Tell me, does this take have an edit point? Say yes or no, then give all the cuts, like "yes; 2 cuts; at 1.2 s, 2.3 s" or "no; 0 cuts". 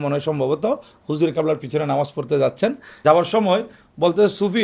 yes; 1 cut; at 3.0 s